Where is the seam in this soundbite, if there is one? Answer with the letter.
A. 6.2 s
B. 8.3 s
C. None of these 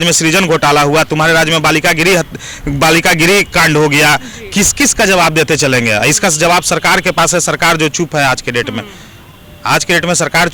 C